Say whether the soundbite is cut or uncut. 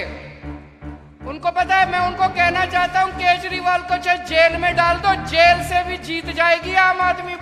uncut